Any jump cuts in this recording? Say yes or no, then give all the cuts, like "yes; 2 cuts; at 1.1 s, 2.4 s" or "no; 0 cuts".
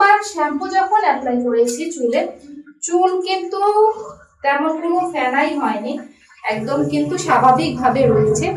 no; 0 cuts